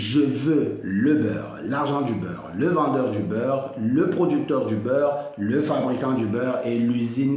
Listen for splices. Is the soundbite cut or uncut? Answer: uncut